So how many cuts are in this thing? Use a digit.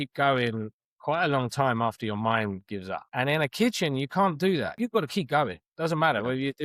2